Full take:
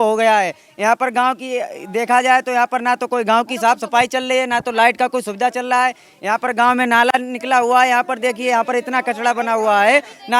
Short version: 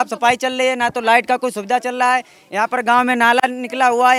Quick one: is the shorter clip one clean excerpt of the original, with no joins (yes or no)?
yes